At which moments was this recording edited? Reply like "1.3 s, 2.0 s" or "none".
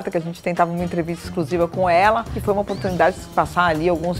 2.3 s, 3.3 s